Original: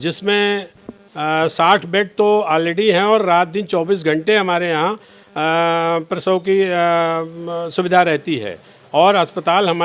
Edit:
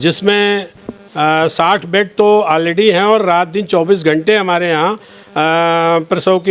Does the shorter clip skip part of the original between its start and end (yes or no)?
no